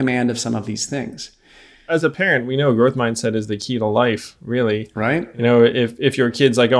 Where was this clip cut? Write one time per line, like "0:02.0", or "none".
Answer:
0:01.9